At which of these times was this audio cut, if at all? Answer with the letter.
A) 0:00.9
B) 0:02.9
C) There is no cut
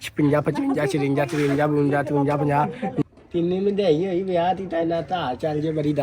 B